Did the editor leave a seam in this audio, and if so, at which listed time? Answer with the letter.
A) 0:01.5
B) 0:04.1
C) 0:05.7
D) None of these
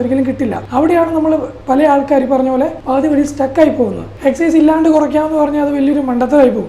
B